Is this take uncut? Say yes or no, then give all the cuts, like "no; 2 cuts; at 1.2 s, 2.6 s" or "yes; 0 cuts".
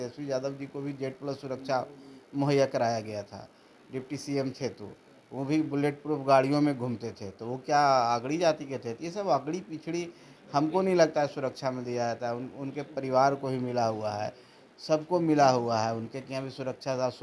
yes; 0 cuts